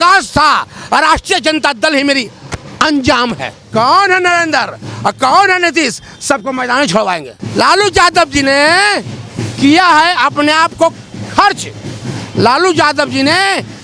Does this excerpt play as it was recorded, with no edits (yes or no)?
no